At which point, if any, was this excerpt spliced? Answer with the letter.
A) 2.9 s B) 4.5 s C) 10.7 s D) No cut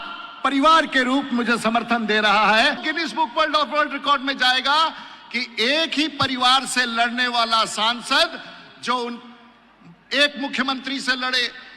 A